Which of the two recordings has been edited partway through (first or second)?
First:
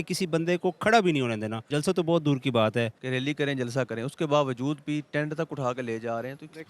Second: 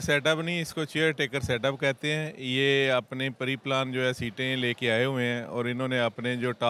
first